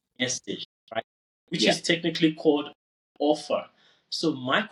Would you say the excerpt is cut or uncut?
uncut